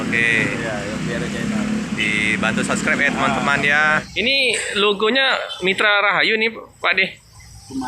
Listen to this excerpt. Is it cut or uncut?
cut